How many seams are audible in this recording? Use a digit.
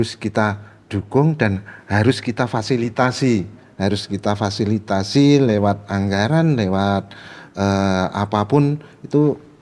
0